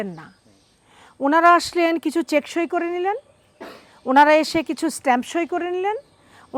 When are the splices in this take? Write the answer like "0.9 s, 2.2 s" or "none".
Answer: none